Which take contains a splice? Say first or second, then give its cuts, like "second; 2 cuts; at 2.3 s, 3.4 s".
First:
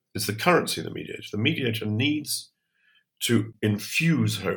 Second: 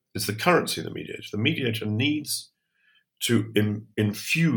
first; 1 cut; at 3.5 s